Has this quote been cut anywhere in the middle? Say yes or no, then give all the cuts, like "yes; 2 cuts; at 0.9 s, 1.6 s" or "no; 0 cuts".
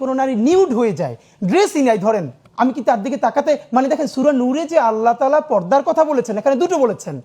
yes; 1 cut; at 2.4 s